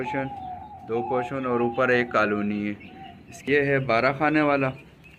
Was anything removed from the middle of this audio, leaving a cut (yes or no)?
yes